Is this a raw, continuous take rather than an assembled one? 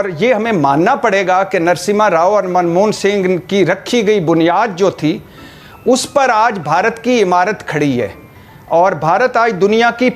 yes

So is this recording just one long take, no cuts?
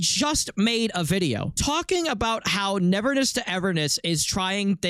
yes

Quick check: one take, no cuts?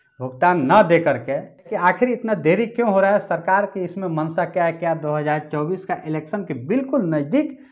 no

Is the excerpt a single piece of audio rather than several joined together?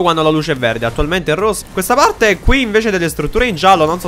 no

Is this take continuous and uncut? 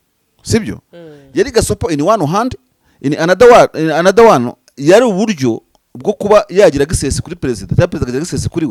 yes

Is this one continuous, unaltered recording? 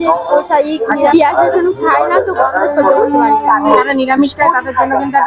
yes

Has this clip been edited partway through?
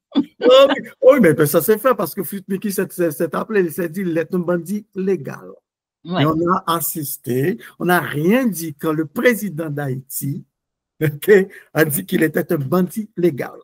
no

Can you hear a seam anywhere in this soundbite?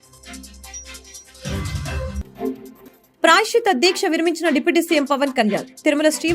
yes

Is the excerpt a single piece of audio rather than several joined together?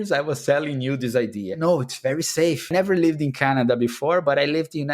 no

